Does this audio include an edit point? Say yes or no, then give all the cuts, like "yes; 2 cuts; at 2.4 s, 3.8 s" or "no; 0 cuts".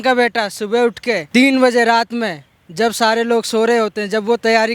yes; 1 cut; at 1.2 s